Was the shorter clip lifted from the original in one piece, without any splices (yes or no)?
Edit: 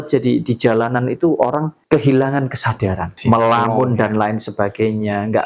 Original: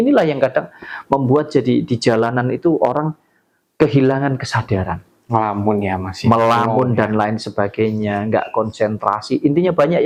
no